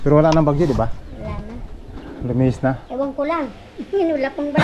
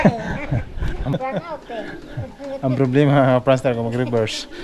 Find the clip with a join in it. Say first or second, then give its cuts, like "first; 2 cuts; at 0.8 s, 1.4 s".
second; 1 cut; at 1.1 s